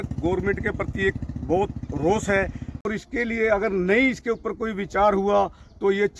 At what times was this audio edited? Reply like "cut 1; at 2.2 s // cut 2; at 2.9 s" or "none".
cut 1; at 2.9 s